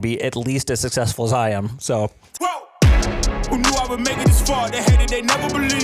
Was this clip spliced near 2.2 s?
yes; 1 cut; at 2.2 s

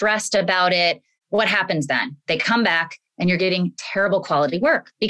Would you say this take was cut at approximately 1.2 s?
yes; 1 cut; at 1.2 s

